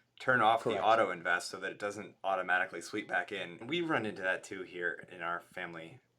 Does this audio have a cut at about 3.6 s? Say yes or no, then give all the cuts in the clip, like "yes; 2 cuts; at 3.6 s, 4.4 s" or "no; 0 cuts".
yes; 1 cut; at 3.6 s